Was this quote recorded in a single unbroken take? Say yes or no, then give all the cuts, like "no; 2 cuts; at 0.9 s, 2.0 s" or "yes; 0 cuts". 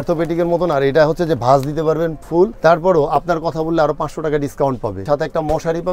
no; 2 cuts; at 2.5 s, 5.0 s